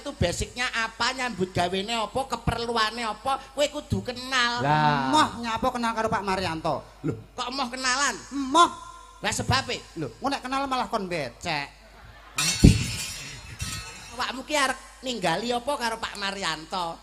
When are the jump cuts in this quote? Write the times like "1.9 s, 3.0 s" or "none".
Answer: 14.2 s